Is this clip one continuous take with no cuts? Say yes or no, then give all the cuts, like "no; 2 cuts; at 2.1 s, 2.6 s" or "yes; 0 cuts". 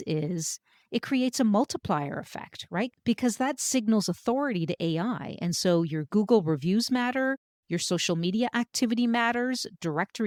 yes; 0 cuts